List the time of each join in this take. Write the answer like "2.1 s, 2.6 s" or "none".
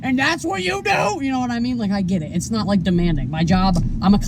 none